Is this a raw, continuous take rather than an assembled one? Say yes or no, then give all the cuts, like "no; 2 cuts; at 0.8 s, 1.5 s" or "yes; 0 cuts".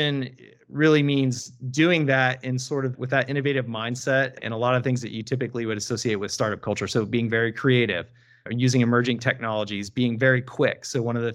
yes; 0 cuts